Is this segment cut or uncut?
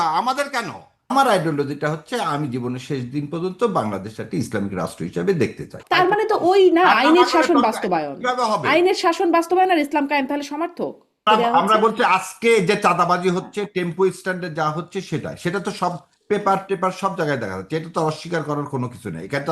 cut